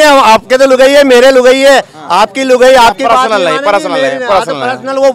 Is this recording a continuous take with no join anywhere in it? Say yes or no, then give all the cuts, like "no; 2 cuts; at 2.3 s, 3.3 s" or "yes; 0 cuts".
yes; 0 cuts